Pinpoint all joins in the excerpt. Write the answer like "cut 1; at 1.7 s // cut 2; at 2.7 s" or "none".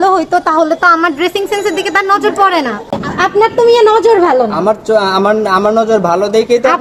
cut 1; at 3.0 s

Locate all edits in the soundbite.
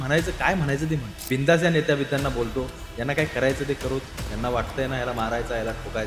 none

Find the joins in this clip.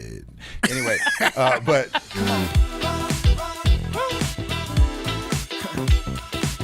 cut 1; at 2.0 s

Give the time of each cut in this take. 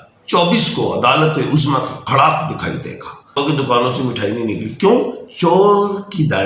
cut 1; at 3.4 s

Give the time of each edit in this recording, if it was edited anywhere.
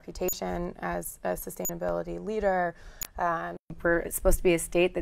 cut 1; at 3.7 s

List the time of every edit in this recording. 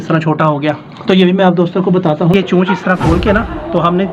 cut 1; at 2.3 s

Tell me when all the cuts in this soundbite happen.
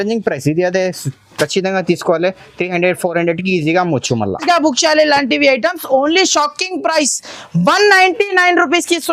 cut 1; at 4.4 s

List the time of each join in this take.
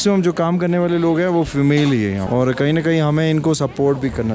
cut 1; at 2.2 s

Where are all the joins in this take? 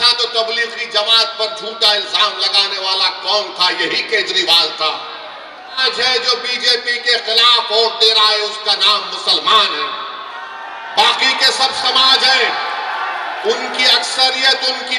cut 1; at 5.8 s

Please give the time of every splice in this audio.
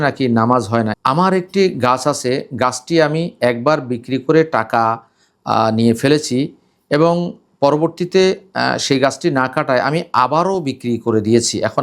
cut 1; at 1.0 s

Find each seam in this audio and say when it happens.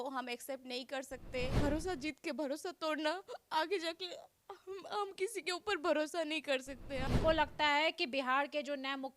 cut 1; at 1.5 s // cut 2; at 7.0 s

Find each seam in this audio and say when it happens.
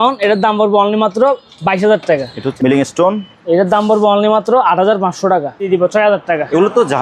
cut 1; at 2.4 s // cut 2; at 5.7 s

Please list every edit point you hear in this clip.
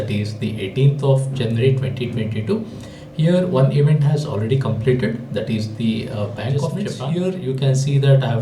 cut 1; at 6.9 s

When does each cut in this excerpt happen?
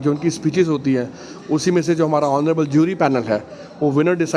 none

